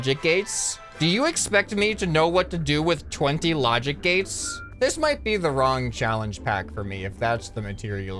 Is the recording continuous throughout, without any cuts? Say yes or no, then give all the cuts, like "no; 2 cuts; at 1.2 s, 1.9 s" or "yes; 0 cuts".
yes; 0 cuts